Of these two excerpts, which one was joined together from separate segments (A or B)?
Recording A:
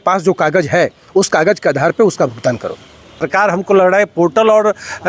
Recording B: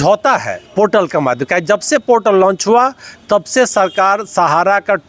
A